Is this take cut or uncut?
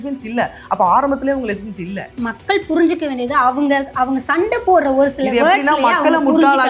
cut